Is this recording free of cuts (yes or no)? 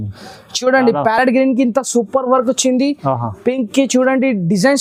yes